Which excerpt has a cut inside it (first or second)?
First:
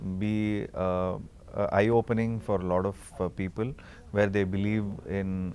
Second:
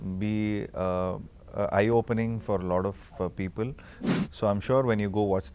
second